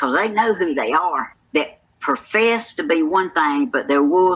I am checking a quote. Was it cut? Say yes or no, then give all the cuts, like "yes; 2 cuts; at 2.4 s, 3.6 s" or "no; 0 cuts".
yes; 1 cut; at 1.5 s